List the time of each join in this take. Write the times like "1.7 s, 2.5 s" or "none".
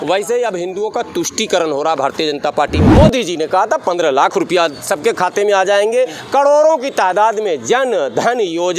2.9 s

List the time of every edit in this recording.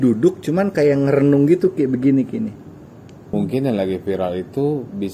3.3 s

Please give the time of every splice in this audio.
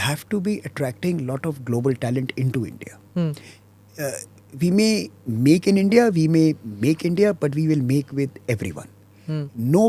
none

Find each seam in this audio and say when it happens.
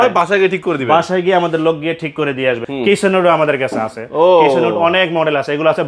2.6 s

